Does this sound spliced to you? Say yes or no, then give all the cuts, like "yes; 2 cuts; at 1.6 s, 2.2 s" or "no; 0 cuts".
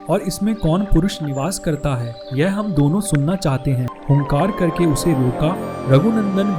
yes; 1 cut; at 3.9 s